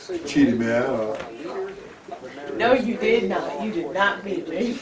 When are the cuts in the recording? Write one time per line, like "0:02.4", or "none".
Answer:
0:03.5